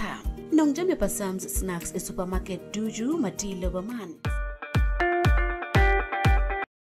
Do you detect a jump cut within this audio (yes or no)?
no